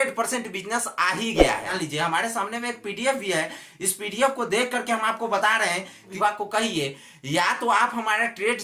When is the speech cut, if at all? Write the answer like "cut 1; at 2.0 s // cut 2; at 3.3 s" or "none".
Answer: cut 1; at 1.7 s // cut 2; at 6.1 s